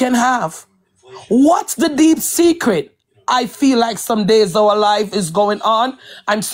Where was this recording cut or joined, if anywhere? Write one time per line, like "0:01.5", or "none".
none